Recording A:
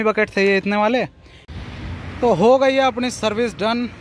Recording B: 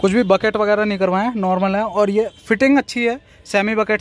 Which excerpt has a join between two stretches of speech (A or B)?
A